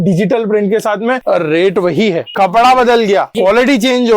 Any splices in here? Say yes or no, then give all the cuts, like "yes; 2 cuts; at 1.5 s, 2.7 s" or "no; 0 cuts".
yes; 3 cuts; at 1.2 s, 2.3 s, 3.3 s